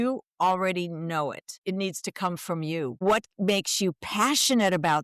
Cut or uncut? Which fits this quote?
cut